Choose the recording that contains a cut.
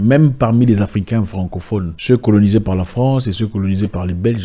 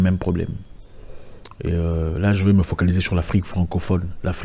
first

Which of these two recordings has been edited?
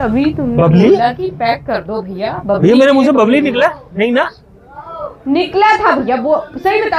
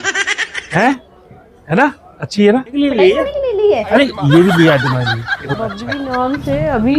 second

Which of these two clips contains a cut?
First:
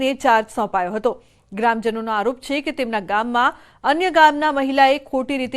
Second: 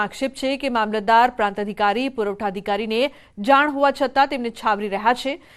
first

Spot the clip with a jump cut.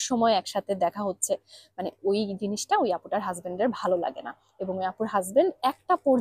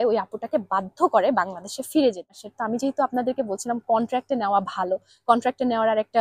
second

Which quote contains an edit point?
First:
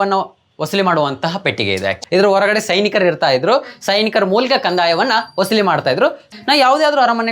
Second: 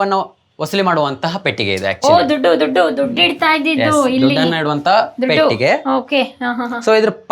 first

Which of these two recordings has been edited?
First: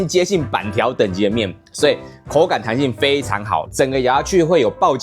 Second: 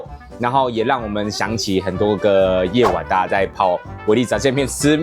first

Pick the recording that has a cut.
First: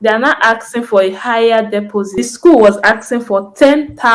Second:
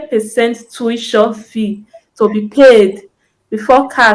first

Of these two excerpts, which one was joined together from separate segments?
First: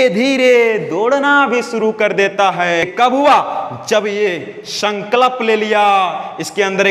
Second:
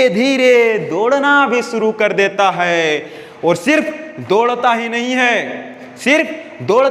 first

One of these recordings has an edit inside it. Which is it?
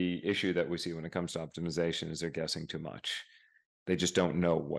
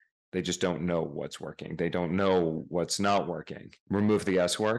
second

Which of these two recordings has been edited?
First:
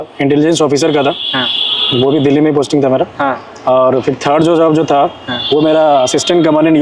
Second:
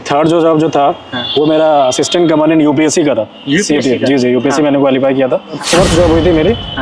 second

